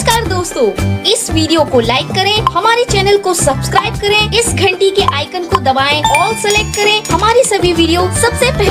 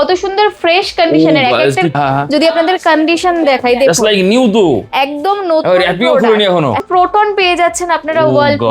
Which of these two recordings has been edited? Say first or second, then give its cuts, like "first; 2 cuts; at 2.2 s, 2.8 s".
second; 2 cuts; at 1.9 s, 6.8 s